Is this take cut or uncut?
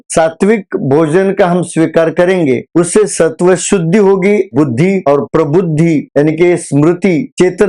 cut